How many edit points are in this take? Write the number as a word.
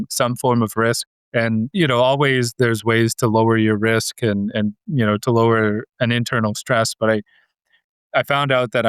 one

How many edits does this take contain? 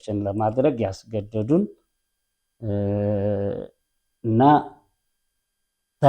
zero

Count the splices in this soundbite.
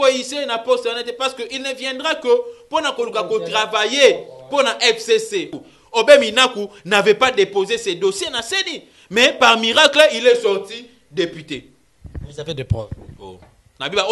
one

